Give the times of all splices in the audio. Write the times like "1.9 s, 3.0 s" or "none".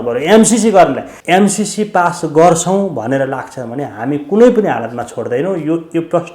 1.1 s